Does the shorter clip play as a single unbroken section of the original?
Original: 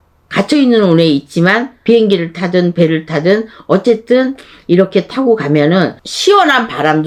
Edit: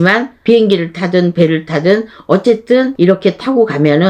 no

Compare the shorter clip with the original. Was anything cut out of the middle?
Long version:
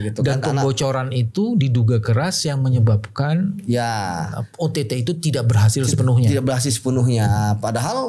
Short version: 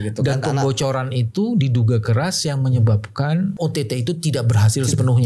yes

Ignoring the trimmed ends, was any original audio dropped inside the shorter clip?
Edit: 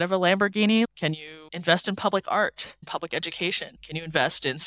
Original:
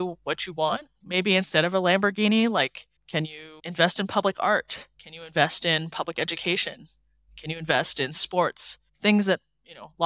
yes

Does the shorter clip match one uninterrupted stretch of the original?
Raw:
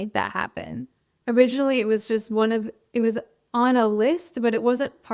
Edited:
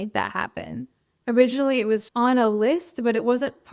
no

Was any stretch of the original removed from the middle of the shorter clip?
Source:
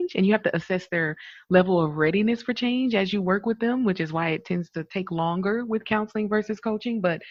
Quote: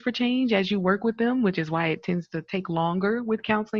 no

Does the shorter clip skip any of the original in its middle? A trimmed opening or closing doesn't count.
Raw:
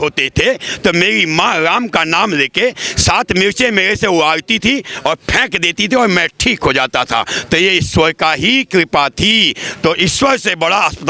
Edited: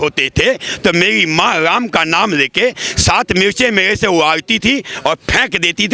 no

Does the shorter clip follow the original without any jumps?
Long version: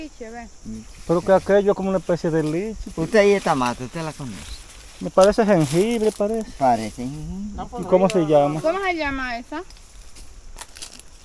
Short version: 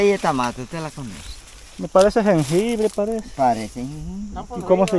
yes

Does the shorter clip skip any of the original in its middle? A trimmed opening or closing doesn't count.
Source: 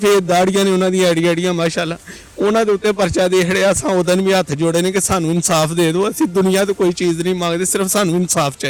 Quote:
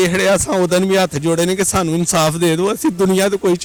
no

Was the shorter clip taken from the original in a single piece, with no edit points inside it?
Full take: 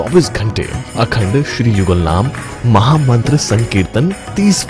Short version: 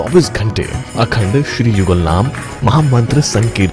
no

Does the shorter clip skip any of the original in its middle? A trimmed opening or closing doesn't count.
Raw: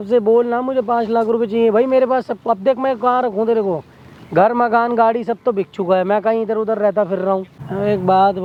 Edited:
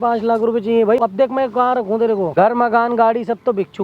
yes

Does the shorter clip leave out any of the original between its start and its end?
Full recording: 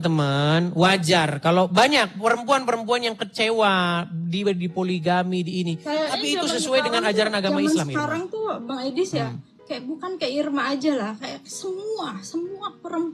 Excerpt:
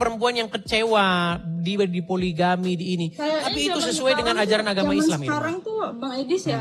no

